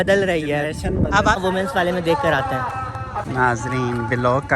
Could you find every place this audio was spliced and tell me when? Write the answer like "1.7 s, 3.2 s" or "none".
1.4 s, 3.2 s